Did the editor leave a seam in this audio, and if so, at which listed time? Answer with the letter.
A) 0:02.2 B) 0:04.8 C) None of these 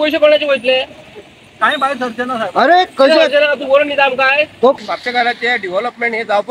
B